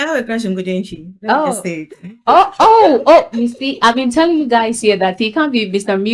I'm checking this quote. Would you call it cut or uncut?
uncut